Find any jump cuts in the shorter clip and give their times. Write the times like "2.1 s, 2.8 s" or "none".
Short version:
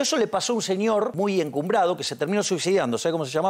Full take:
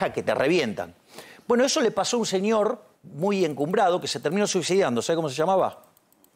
1.1 s